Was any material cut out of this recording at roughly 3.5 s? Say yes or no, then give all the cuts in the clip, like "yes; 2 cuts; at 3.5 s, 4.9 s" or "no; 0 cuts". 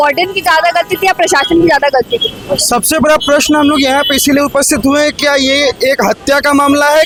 no; 0 cuts